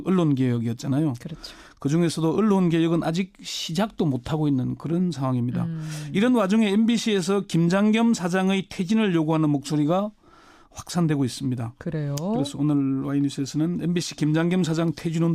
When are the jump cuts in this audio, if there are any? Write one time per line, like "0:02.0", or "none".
0:01.0